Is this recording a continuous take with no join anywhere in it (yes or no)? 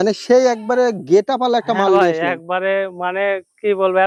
yes